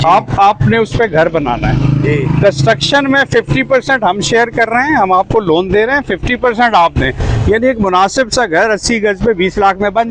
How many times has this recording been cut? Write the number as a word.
zero